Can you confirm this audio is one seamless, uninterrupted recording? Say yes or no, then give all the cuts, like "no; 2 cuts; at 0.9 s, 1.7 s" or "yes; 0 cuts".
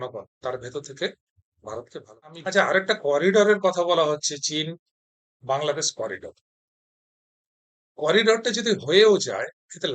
no; 1 cut; at 2.0 s